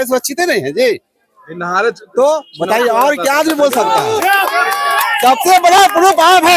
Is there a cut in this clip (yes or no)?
no